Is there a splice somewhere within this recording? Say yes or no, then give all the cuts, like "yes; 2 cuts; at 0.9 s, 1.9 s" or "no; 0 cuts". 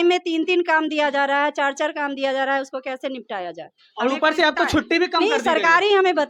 no; 0 cuts